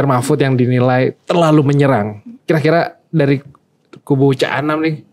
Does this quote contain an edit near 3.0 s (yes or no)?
no